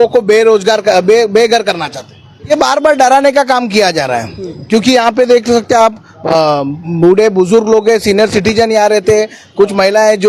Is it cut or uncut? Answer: cut